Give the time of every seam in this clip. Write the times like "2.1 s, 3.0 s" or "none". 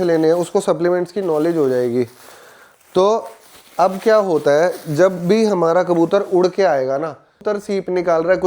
7.5 s